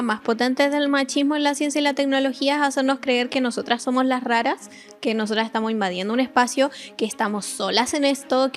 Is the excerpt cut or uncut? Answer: uncut